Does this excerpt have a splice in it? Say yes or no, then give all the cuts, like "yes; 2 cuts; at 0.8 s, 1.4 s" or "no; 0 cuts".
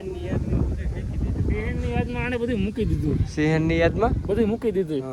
no; 0 cuts